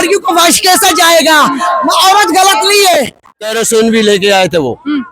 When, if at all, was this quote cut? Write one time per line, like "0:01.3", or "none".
0:03.6